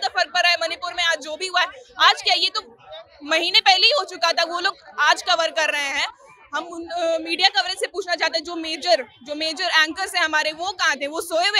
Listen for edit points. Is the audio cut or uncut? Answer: uncut